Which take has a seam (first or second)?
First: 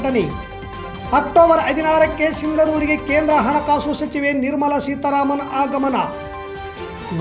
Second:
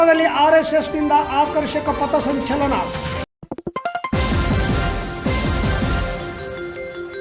second